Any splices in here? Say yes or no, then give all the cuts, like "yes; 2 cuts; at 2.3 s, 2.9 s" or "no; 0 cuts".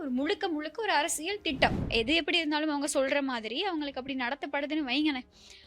yes; 1 cut; at 1.8 s